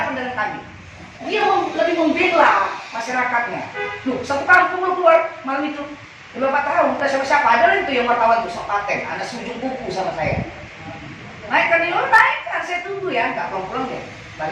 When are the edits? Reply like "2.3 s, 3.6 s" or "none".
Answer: 1.2 s

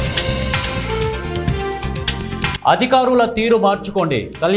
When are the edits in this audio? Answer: 1.2 s

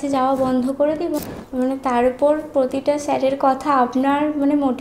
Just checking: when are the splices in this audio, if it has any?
1.2 s

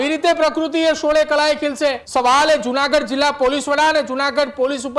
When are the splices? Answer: 2.0 s

